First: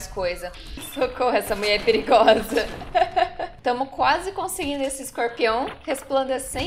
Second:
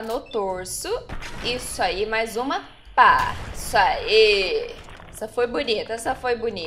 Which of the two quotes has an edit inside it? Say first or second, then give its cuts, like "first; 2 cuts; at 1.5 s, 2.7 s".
first; 2 cuts; at 0.8 s, 3.5 s